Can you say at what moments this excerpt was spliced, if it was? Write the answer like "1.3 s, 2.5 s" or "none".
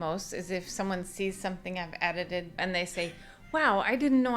2.6 s